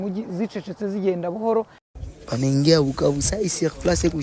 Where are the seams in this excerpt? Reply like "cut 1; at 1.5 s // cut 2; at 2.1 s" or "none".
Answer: none

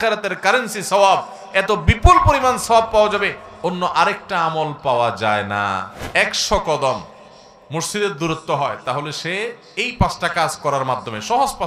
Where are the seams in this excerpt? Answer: cut 1; at 5.9 s

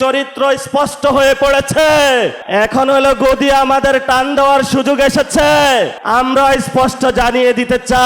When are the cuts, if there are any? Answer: cut 1; at 2.4 s // cut 2; at 6.0 s

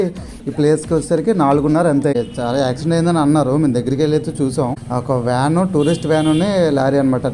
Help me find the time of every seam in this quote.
cut 1; at 2.1 s // cut 2; at 4.8 s

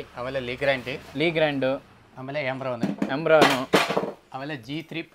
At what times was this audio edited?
none

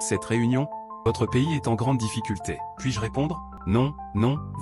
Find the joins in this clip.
cut 1; at 0.9 s // cut 2; at 3.5 s

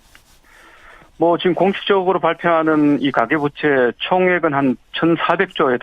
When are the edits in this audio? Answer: cut 1; at 4.2 s

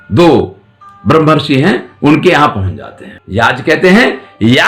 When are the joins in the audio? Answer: cut 1; at 3.1 s

